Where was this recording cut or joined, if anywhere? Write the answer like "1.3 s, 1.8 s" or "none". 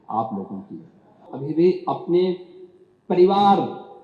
1.3 s